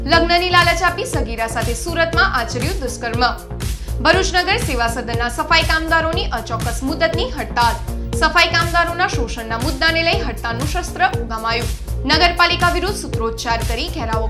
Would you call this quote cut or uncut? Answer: uncut